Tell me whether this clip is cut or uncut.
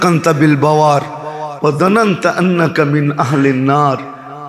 uncut